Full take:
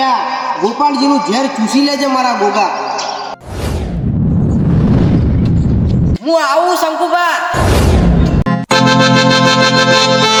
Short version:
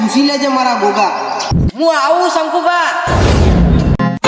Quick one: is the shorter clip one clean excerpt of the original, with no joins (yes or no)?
no